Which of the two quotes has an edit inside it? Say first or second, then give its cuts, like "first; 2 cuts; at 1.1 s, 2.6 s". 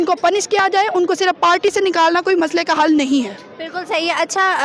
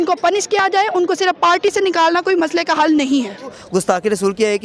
second; 1 cut; at 3.6 s